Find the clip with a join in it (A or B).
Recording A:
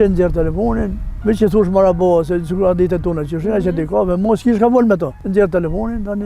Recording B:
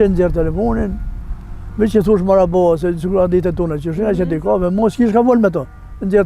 A